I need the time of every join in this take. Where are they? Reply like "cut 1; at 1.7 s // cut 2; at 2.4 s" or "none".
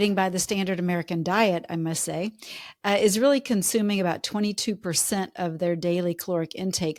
none